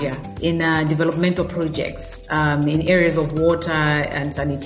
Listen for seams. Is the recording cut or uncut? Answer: uncut